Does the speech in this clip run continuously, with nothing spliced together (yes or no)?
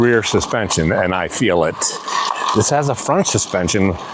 yes